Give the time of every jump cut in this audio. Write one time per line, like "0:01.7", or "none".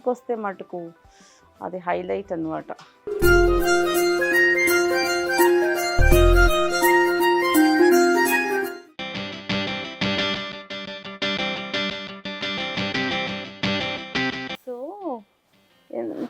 none